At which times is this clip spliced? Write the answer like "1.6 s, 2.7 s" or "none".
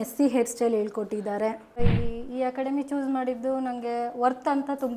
1.8 s